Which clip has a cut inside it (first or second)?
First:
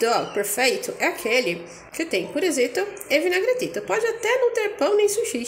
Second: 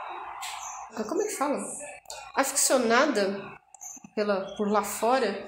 second